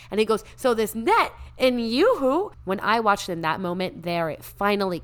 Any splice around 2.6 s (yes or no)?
yes